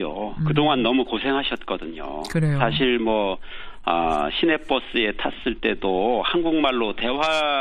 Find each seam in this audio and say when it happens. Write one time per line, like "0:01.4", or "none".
0:05.8